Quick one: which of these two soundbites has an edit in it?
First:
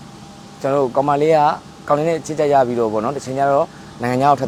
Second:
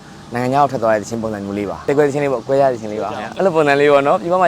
second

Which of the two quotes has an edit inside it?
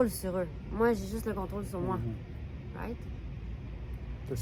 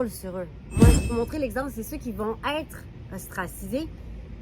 second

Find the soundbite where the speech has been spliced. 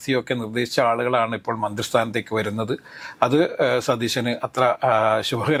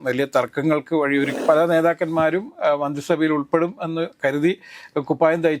second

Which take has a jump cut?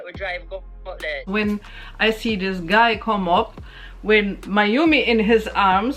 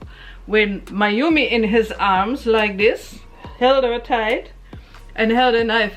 first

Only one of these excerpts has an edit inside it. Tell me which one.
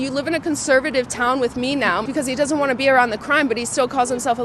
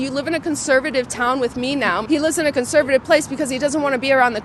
first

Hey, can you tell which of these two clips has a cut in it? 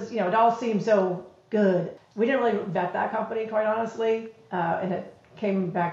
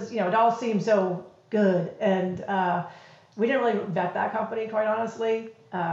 first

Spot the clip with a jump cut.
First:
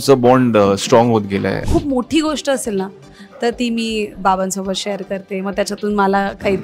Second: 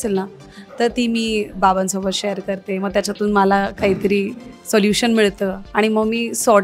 first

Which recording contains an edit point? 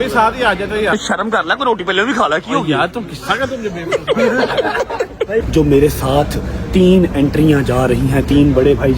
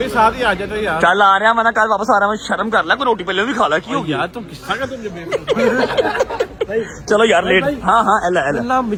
first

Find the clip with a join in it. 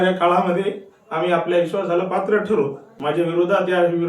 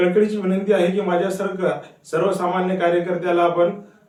first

